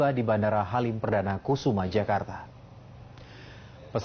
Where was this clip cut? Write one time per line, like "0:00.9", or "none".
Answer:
none